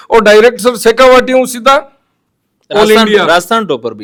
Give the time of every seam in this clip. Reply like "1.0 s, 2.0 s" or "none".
none